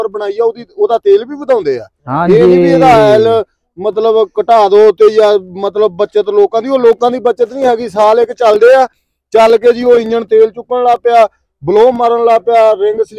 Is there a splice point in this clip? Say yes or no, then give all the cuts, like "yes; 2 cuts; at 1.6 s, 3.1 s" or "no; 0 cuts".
no; 0 cuts